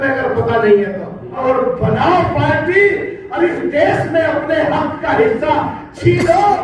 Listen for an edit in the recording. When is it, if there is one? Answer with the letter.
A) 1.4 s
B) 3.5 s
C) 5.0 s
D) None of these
A